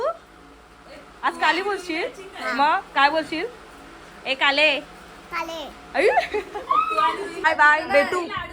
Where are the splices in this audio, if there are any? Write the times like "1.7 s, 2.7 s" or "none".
7.4 s

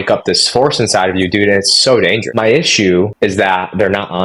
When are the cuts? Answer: 2.2 s, 3.1 s

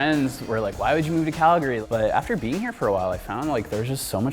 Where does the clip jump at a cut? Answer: 1.8 s

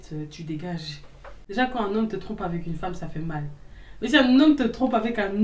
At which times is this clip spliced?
1.3 s

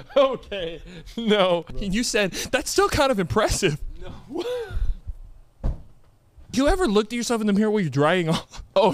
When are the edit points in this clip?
1.7 s, 6.5 s

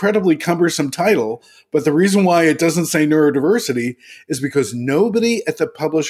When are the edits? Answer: none

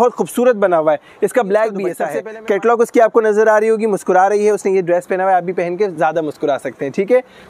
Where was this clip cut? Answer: 2.1 s

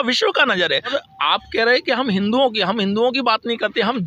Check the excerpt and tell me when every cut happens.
0.9 s

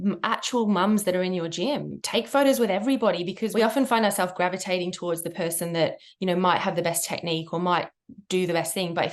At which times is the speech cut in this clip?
1.9 s, 3.4 s

